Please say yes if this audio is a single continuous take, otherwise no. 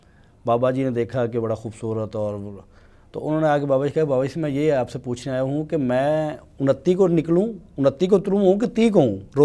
yes